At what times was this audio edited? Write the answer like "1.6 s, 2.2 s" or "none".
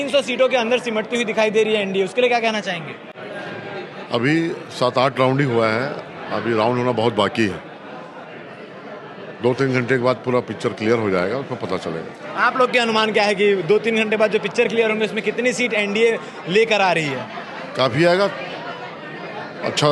none